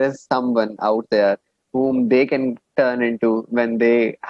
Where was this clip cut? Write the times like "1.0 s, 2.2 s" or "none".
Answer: none